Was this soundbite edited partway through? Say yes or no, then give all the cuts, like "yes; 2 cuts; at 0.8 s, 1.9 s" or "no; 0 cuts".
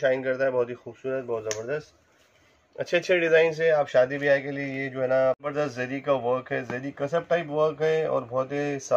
yes; 1 cut; at 5.4 s